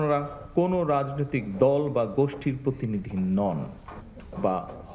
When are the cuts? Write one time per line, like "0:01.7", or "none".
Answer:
none